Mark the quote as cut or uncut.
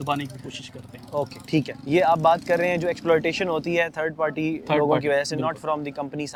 uncut